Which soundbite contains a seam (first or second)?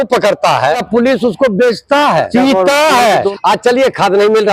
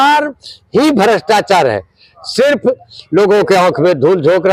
first